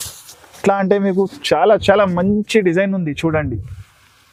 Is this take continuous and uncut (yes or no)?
yes